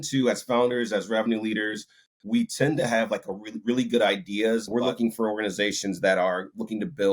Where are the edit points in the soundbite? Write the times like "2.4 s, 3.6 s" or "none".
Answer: 4.7 s

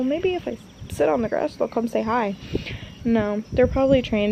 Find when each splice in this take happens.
none

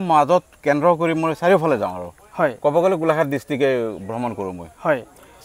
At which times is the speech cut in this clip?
none

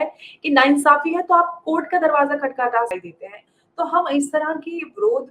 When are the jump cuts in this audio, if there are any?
2.9 s

